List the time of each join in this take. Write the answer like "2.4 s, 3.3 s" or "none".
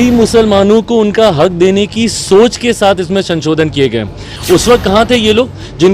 4.3 s